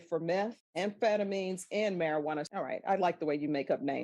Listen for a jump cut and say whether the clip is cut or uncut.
cut